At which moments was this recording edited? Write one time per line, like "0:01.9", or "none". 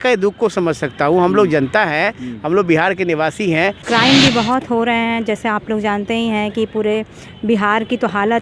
0:03.8